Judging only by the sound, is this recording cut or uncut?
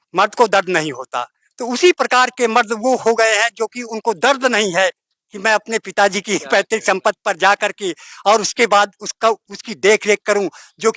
uncut